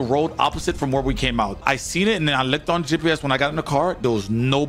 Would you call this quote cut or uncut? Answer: uncut